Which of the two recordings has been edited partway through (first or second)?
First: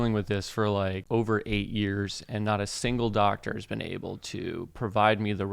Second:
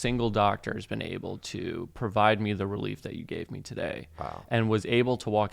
first